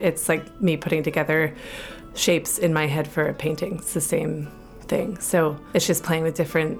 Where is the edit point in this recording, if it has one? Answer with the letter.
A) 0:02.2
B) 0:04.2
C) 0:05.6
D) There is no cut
C